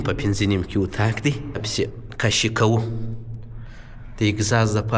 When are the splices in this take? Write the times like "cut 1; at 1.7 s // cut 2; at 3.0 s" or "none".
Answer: cut 1; at 1.7 s